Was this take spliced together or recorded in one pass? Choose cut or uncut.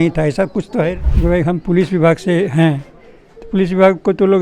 cut